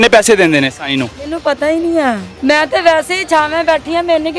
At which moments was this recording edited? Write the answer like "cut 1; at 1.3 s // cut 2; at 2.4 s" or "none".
cut 1; at 2.3 s